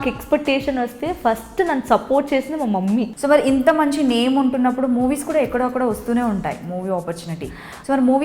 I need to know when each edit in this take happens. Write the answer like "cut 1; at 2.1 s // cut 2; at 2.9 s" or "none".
cut 1; at 3.1 s